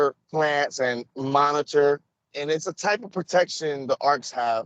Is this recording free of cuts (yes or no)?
no